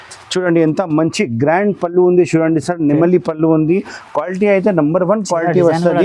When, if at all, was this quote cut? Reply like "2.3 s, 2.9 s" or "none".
none